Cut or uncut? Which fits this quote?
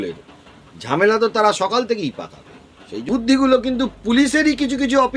cut